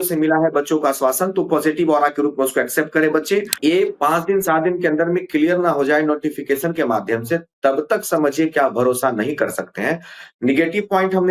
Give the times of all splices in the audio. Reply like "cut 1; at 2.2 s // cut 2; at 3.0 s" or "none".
cut 1; at 3.5 s